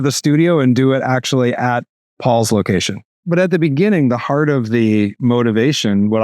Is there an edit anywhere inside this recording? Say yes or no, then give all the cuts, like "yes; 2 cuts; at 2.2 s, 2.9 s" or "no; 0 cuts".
yes; 1 cut; at 3.2 s